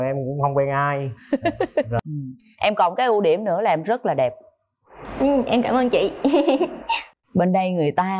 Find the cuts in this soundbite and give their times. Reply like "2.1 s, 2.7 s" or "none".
2.0 s, 7.0 s